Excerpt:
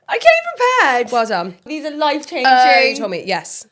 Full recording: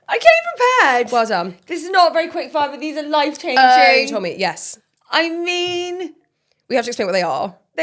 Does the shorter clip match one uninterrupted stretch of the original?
no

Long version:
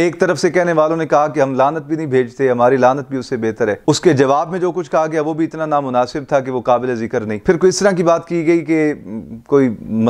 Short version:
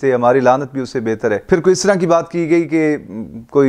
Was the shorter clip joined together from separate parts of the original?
yes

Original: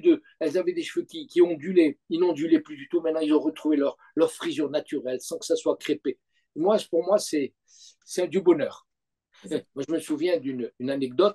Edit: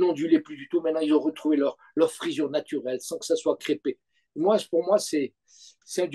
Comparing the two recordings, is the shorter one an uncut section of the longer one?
yes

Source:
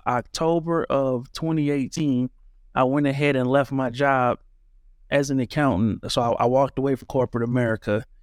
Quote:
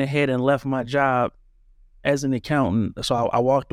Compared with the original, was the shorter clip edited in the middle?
no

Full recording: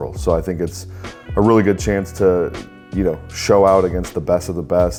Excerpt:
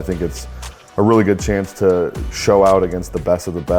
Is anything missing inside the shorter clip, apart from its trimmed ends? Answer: yes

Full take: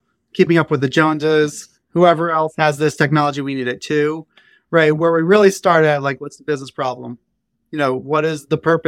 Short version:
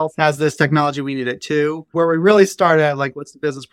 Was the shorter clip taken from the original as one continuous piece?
no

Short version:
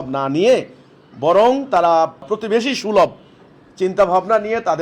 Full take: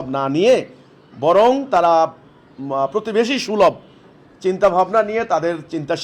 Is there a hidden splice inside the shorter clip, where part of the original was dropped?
yes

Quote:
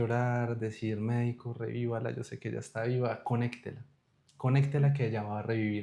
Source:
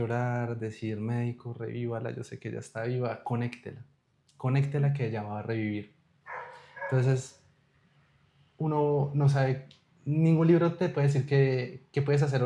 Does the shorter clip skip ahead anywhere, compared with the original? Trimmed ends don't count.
no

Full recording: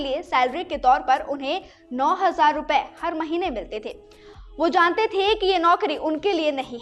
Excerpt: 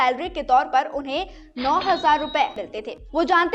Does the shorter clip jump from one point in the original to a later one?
yes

